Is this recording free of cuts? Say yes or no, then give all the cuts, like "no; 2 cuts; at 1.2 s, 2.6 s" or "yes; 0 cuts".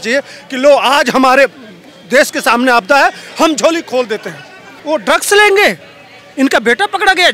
no; 1 cut; at 4.7 s